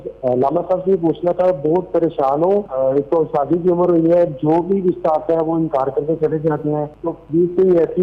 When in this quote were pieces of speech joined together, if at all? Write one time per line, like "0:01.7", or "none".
0:02.7
0:06.9